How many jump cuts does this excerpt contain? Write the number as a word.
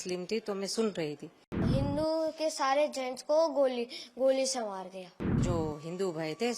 two